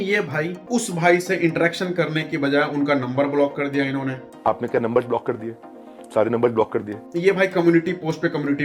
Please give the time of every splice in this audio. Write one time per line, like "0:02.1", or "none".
0:04.3